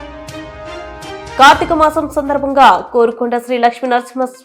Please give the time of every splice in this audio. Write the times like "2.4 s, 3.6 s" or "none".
1.4 s